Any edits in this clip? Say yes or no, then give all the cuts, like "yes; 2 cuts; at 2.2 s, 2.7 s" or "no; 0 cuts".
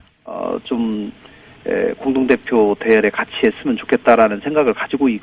no; 0 cuts